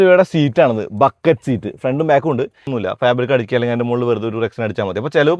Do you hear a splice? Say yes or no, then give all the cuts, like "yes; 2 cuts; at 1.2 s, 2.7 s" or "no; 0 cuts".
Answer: yes; 1 cut; at 2.7 s